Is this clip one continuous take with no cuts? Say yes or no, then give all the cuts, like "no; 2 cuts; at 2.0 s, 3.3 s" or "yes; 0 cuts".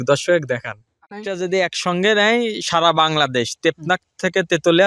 no; 1 cut; at 1.1 s